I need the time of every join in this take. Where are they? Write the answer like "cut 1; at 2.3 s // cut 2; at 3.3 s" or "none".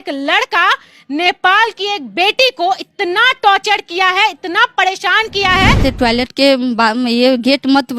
cut 1; at 5.8 s